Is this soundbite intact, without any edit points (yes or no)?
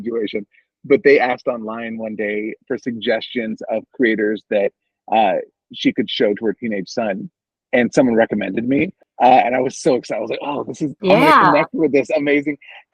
no